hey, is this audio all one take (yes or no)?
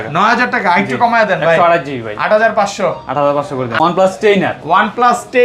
no